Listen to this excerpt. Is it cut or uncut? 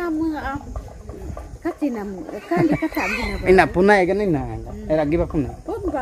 uncut